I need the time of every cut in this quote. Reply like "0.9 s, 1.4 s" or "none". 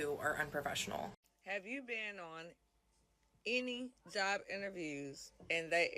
1.2 s